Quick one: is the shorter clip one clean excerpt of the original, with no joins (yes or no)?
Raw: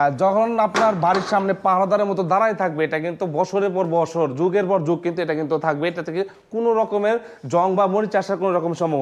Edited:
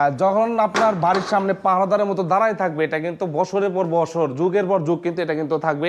yes